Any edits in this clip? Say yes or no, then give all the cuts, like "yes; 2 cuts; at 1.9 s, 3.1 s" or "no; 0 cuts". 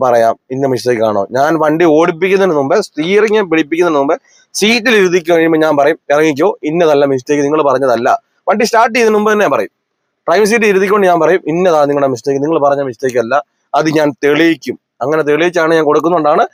no; 0 cuts